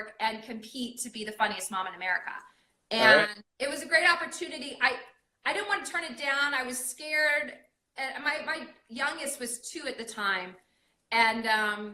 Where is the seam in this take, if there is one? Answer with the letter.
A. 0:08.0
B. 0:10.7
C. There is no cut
C